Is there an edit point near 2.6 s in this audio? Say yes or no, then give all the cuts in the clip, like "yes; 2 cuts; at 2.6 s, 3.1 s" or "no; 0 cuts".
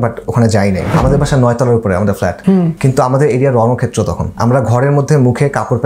yes; 3 cuts; at 0.9 s, 2.6 s, 4.3 s